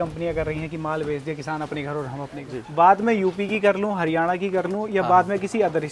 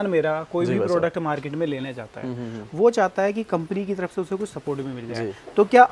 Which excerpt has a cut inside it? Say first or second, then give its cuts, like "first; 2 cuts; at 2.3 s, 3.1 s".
first; 1 cut; at 2.6 s